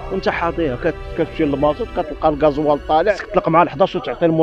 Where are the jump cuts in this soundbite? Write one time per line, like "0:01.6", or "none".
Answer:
0:03.2